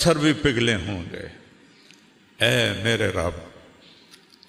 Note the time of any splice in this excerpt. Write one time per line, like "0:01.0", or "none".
none